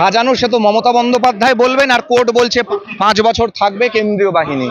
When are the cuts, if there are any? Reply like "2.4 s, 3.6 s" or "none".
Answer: 2.7 s